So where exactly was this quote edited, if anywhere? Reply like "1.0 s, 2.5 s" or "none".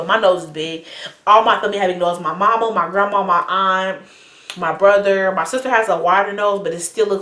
none